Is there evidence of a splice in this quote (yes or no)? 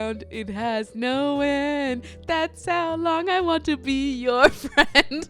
no